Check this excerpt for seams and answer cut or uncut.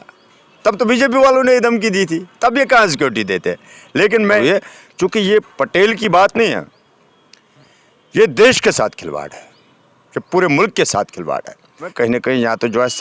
cut